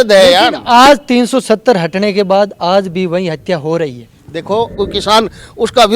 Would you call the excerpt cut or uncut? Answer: cut